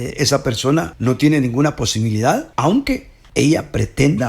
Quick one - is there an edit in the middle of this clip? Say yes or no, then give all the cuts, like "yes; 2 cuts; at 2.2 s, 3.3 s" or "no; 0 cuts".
yes; 3 cuts; at 0.9 s, 2.5 s, 3.2 s